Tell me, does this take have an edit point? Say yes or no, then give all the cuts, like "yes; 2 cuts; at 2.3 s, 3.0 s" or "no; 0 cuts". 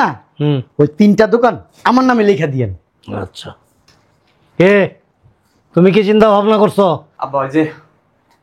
yes; 1 cut; at 7.1 s